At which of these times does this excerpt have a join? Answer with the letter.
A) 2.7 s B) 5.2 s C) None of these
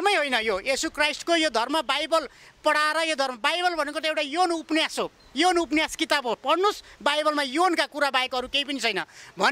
C